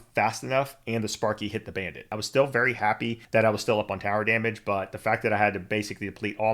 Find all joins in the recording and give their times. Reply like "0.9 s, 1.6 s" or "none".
2.2 s, 3.1 s

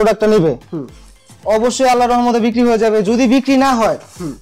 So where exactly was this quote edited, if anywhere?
none

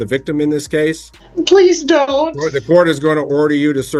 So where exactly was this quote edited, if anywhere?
1.1 s

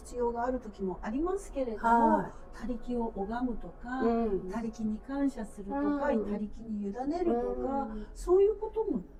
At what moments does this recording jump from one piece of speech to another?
none

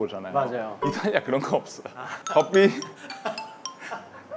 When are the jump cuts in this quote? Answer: none

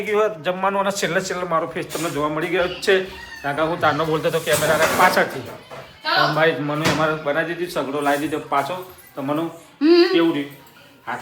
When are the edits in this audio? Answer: none

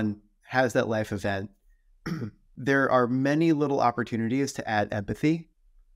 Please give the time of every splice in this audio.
none

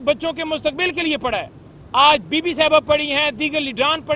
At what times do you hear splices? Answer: none

